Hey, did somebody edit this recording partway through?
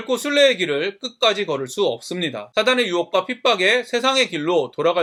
no; 0 cuts

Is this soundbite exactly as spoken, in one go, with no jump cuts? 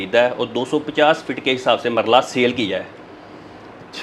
yes; 0 cuts

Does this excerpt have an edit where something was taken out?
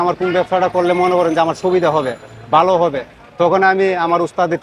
no; 0 cuts

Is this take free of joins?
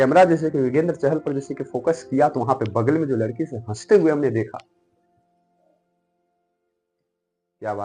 yes; 0 cuts

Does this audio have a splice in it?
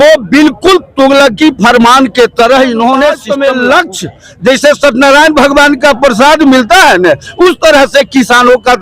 yes; 1 cut; at 3.2 s

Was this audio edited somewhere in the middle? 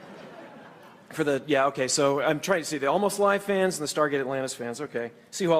no; 0 cuts

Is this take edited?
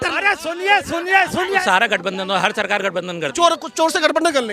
yes; 1 cut; at 1.6 s

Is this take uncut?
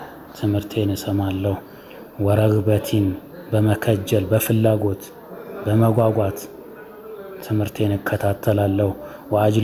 yes; 0 cuts

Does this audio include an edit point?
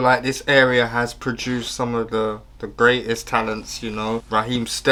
no; 0 cuts

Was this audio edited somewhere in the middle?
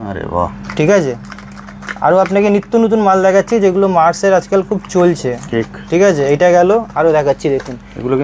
no; 0 cuts

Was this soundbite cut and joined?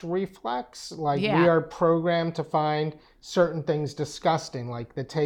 no; 0 cuts

